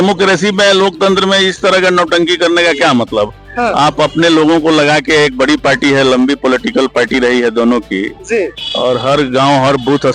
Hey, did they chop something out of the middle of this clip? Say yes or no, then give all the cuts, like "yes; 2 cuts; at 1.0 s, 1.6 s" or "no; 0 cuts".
no; 0 cuts